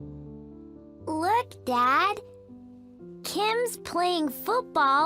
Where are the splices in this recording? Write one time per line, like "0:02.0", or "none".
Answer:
0:00.9